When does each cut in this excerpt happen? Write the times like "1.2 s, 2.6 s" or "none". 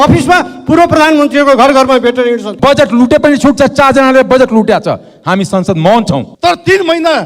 2.5 s, 6.3 s